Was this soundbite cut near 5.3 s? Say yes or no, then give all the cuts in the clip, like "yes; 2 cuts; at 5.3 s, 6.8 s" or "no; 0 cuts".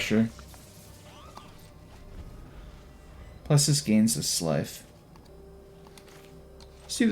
yes; 1 cut; at 5.3 s